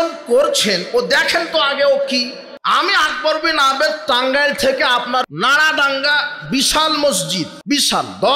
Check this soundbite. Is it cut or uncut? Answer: cut